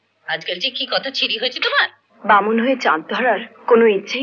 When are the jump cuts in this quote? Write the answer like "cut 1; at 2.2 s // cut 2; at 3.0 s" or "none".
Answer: cut 1; at 2.0 s

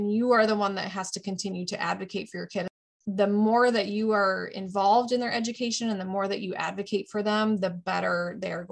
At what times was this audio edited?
cut 1; at 2.8 s

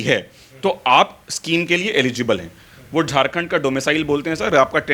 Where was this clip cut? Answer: none

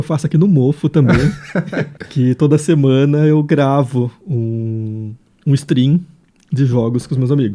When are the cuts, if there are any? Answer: cut 1; at 2.0 s

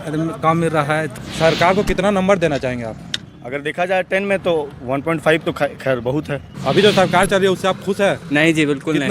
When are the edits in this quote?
cut 1; at 1.1 s // cut 2; at 6.4 s

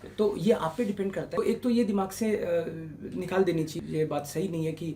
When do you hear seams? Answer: cut 1; at 1.3 s // cut 2; at 3.7 s

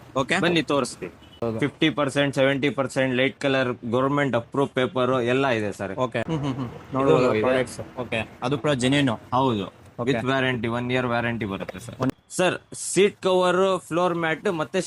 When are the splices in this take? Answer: cut 1; at 1.4 s // cut 2; at 6.3 s // cut 3; at 12.1 s

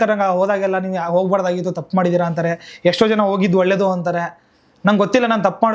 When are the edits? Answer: none

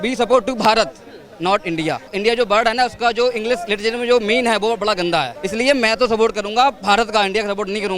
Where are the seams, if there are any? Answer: cut 1; at 2.1 s // cut 2; at 5.4 s

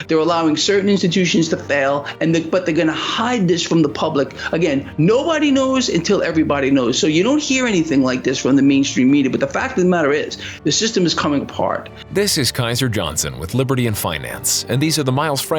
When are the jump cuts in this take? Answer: cut 1; at 11.9 s

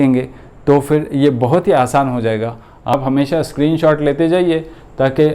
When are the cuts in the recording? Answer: cut 1; at 2.9 s

